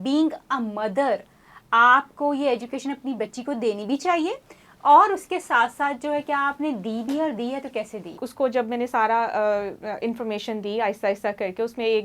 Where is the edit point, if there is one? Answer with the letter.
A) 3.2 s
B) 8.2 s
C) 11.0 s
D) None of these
B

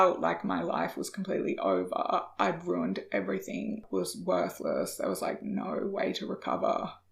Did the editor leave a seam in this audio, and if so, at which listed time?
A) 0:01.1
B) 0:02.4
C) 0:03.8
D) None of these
C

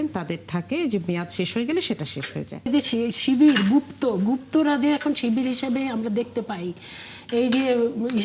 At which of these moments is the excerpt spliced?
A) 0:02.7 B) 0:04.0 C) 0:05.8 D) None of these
A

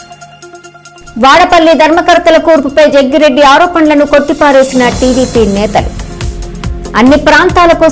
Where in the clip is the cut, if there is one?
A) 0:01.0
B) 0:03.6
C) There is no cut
A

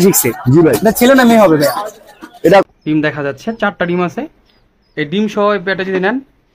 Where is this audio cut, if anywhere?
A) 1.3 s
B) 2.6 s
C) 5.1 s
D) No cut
B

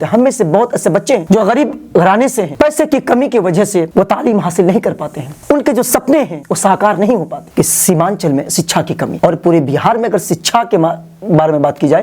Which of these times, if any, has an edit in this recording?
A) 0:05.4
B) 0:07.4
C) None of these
B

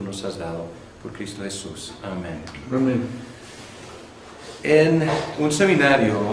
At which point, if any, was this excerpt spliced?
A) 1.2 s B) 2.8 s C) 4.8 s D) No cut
D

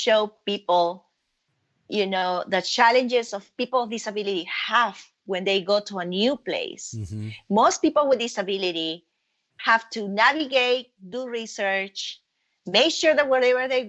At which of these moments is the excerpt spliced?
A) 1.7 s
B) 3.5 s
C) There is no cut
B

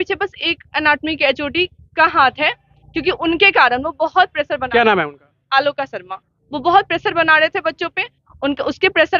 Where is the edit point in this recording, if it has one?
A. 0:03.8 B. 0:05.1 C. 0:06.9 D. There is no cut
D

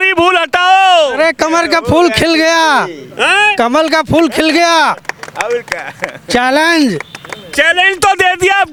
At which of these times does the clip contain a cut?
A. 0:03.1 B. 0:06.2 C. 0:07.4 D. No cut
D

